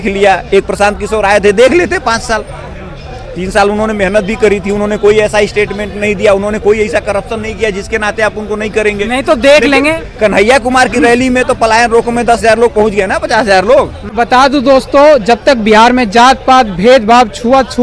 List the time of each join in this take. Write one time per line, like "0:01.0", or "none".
0:14.1